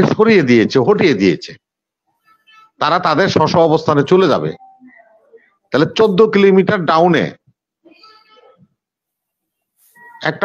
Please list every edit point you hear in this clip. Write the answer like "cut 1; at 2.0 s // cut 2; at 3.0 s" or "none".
none